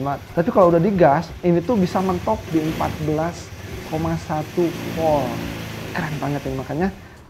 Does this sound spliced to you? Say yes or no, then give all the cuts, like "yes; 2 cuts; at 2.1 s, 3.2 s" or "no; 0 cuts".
no; 0 cuts